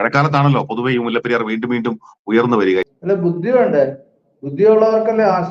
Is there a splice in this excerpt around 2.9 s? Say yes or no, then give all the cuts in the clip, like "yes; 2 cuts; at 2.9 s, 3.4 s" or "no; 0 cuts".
yes; 1 cut; at 2.9 s